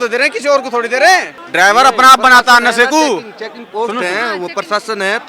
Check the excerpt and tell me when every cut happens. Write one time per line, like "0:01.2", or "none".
0:01.4